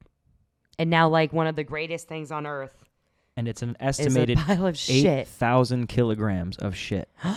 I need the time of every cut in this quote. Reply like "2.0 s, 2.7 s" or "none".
none